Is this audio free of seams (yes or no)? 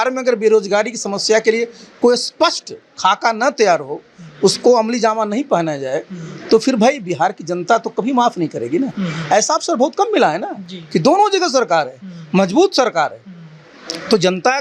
yes